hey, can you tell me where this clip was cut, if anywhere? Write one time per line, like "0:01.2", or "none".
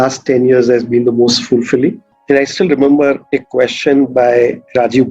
0:02.1